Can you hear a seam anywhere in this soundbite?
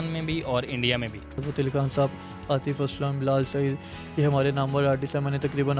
yes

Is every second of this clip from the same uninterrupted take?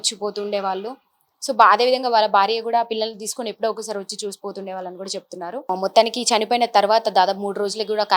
no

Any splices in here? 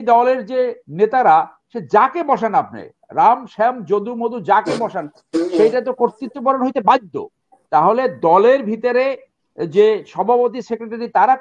no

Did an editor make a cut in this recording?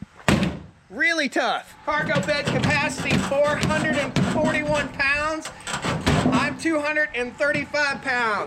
yes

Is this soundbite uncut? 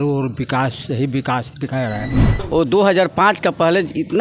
no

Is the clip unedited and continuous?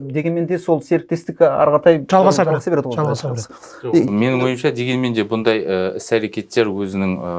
yes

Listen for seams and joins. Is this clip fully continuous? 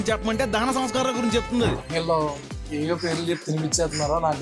no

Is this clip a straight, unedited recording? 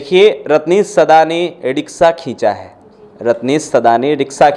yes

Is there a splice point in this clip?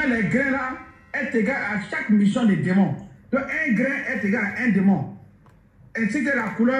no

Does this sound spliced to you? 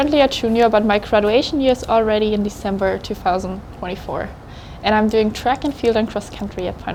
no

